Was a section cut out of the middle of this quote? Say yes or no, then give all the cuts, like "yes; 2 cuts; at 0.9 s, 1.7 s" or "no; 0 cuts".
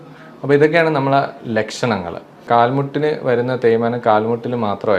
yes; 1 cut; at 2.5 s